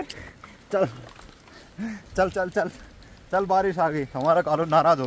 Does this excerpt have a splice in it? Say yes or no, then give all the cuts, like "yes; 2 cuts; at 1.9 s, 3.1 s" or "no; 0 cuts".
no; 0 cuts